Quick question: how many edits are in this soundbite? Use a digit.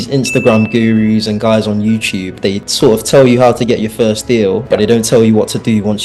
0